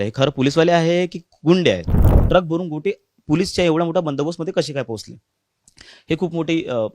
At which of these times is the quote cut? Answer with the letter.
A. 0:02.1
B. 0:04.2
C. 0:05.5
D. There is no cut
A